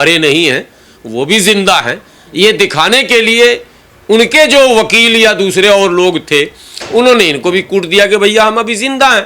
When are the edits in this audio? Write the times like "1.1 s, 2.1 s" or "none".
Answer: none